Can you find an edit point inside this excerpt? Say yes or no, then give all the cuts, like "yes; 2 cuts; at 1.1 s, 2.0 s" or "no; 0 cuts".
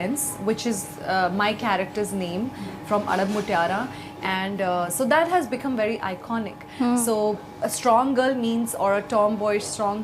no; 0 cuts